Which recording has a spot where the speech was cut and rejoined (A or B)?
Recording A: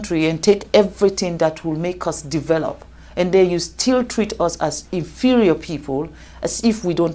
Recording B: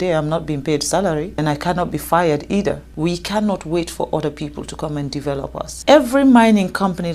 B